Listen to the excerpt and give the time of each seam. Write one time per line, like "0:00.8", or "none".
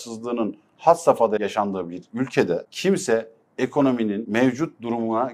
0:01.4
0:02.7
0:04.2